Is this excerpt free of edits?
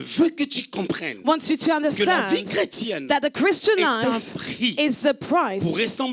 yes; 0 cuts

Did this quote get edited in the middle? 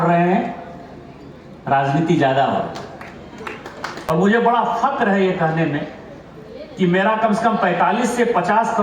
yes; 1 cut; at 3.9 s

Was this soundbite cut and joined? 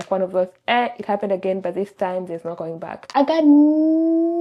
yes; 1 cut; at 3.0 s

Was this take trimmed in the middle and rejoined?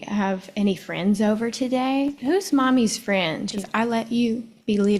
yes; 2 cuts; at 2.2 s, 3.6 s

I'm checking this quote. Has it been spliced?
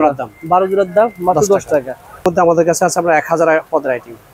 yes; 1 cut; at 2.4 s

